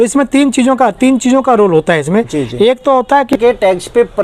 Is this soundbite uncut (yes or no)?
no